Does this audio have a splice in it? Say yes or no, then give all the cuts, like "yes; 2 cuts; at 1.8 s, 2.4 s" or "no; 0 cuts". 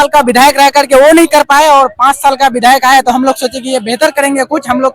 no; 0 cuts